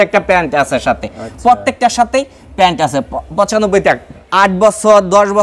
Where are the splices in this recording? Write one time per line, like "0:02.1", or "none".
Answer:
0:04.1